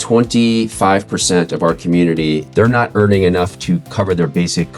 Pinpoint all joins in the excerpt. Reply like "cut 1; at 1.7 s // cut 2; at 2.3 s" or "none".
cut 1; at 2.5 s // cut 2; at 3.9 s